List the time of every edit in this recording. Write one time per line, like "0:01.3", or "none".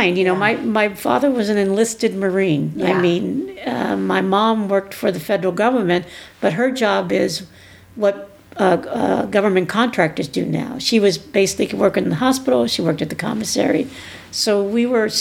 none